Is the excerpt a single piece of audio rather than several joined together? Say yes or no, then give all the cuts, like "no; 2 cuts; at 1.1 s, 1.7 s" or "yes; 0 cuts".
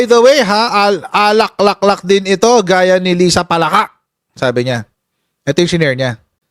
yes; 0 cuts